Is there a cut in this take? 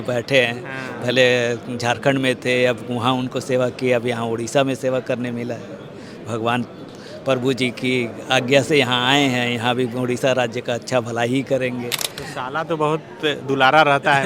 no; 0 cuts

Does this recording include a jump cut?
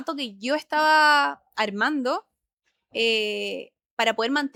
no; 0 cuts

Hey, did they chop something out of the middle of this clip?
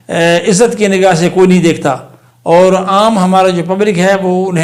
no; 0 cuts

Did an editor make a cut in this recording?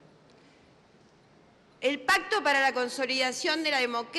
yes; 1 cut; at 3.0 s

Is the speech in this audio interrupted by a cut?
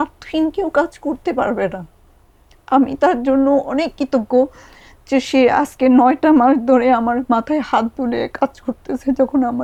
no; 0 cuts

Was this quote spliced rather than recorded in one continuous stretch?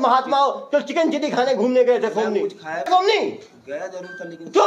yes; 1 cut; at 2.9 s

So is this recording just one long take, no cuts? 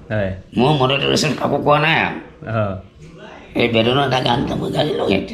yes; 0 cuts

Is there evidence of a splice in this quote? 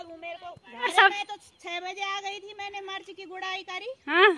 yes; 1 cut; at 0.9 s

